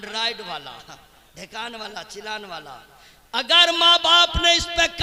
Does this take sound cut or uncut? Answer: uncut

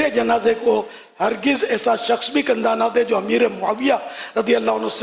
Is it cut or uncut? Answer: uncut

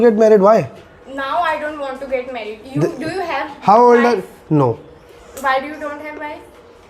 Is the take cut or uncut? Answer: uncut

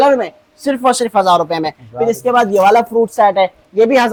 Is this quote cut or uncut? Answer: uncut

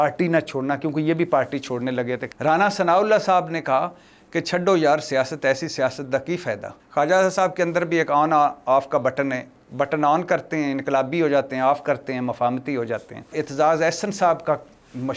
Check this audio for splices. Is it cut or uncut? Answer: cut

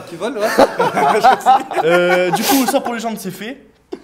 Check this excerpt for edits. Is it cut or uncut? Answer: uncut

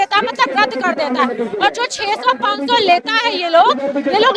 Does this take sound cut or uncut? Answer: uncut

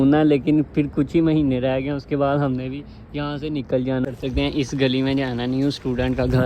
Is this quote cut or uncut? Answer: cut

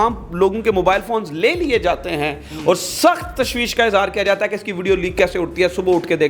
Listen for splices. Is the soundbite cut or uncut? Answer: uncut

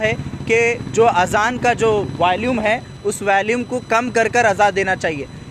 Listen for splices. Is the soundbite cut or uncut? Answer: uncut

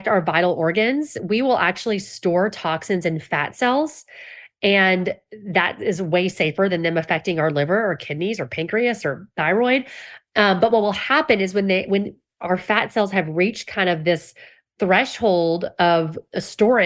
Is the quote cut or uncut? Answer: uncut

